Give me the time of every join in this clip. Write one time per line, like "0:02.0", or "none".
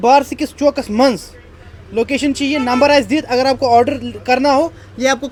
none